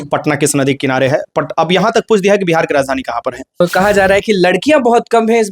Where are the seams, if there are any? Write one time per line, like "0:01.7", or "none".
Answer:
0:03.6